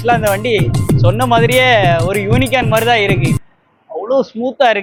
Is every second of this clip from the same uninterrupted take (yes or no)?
yes